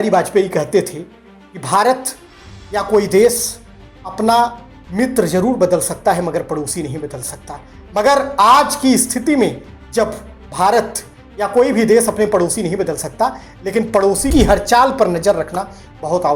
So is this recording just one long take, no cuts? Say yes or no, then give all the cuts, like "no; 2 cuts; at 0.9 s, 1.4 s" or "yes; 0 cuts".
yes; 0 cuts